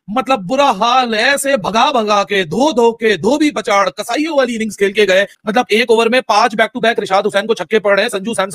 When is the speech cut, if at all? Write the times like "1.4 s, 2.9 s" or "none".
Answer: 5.4 s